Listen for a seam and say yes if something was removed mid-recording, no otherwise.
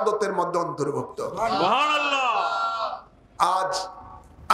no